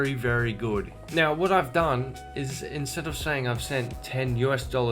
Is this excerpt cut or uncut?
cut